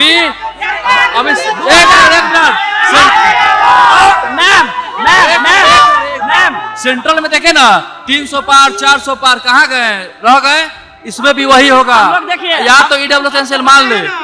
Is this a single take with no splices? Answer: yes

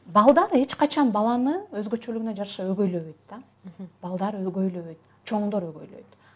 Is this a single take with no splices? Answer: yes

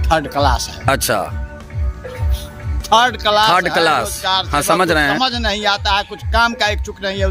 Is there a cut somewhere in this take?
no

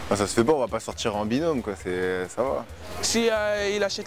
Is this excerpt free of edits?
no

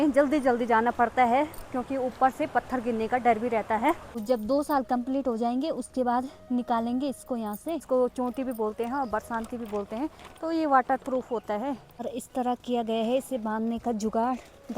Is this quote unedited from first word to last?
no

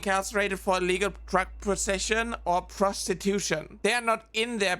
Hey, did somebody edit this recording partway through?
yes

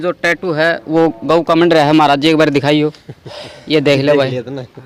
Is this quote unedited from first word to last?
yes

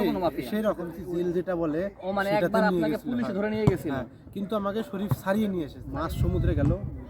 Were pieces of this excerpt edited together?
yes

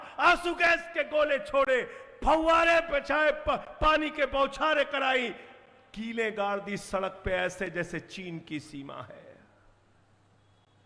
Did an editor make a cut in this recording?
no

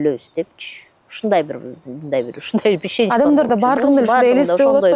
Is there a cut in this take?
no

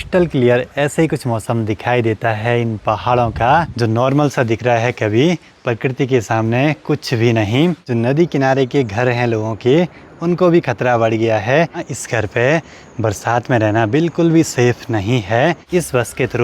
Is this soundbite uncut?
no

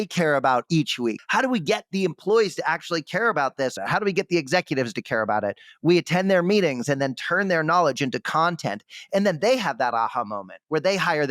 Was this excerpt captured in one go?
no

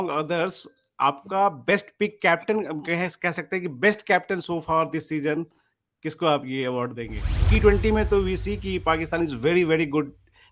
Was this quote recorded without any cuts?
no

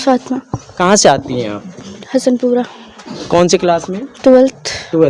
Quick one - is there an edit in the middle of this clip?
no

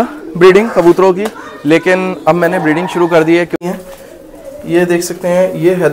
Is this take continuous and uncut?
no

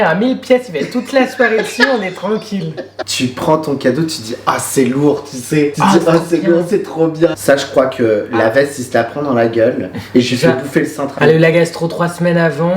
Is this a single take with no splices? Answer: no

